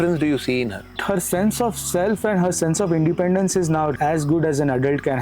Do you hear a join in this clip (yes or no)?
yes